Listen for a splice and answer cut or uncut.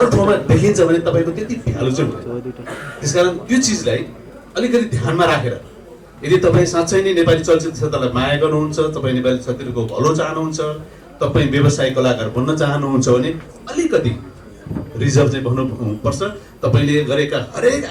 uncut